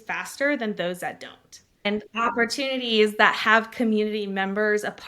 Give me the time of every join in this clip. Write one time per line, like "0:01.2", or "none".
0:01.8